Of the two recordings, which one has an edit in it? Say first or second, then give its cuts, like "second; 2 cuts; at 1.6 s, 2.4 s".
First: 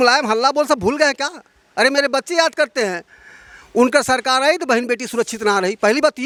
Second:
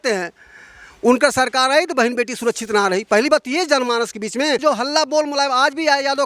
second; 1 cut; at 4.6 s